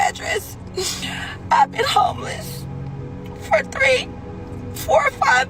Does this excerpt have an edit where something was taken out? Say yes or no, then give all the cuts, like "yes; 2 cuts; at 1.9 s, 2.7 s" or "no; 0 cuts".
no; 0 cuts